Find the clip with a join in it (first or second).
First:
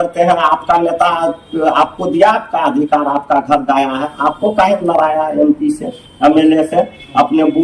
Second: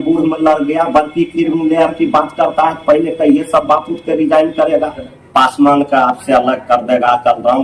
second